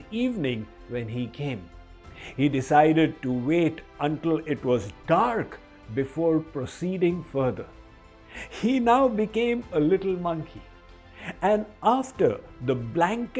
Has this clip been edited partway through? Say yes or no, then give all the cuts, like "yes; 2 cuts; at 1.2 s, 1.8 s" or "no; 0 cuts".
no; 0 cuts